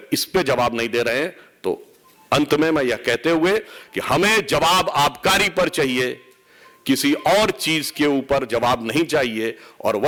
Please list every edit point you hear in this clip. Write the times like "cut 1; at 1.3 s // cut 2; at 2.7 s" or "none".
none